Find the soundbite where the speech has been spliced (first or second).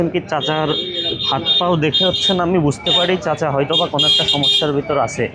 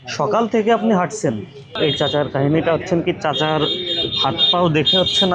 second